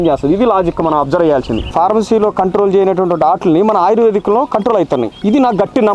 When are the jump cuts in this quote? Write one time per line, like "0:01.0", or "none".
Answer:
0:01.7